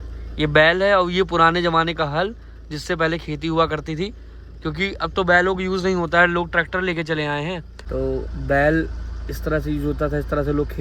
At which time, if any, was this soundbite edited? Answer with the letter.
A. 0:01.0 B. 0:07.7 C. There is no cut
B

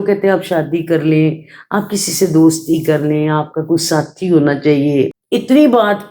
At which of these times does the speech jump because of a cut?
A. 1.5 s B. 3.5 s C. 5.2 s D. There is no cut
C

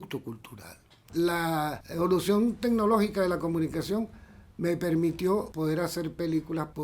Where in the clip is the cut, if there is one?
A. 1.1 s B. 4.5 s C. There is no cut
A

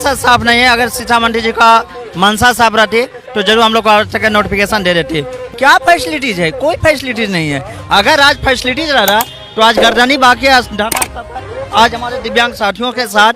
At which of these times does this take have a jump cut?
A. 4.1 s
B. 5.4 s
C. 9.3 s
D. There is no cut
B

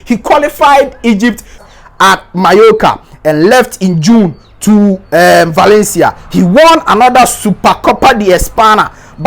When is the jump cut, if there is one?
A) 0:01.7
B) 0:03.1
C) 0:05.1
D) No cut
A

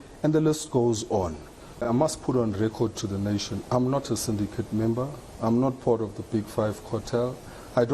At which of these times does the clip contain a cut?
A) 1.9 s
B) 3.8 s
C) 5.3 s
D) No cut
A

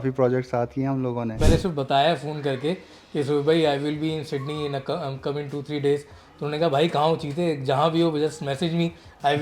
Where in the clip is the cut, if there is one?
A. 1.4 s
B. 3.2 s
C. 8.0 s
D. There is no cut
A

